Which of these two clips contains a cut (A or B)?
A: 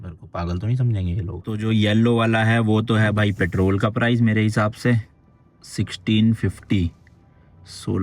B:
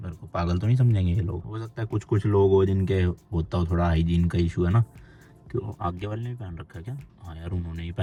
A